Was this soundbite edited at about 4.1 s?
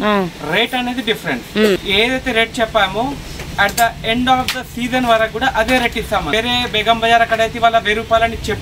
no; 2 cuts; at 1.8 s, 6.3 s

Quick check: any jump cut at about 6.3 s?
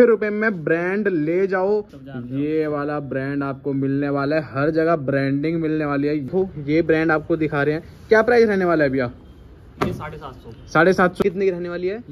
yes; 3 cuts; at 2.0 s, 6.3 s, 11.2 s

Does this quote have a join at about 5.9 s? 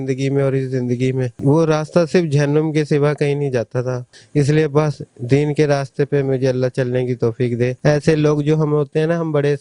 no; 2 cuts; at 4.0 s, 7.8 s

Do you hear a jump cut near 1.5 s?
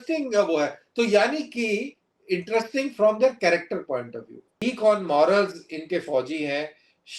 no; 1 cut; at 4.5 s

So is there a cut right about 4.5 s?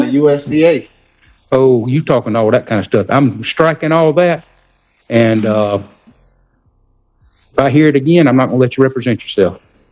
no; 0 cuts

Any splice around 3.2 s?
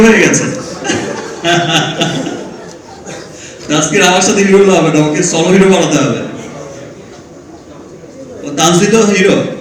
no; 0 cuts

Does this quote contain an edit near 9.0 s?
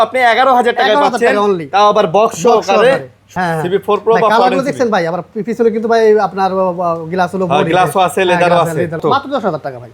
yes; 2 cuts; at 3.3 s, 9.0 s

